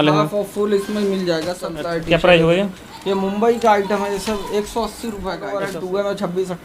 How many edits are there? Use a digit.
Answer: 2